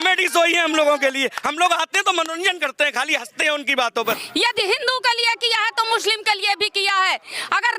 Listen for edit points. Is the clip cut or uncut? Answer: cut